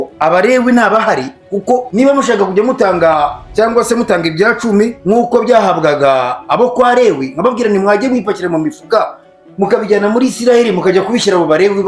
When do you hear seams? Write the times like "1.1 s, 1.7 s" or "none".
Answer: 1.9 s, 5.0 s